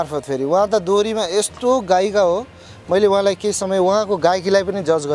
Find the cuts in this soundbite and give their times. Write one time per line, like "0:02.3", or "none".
none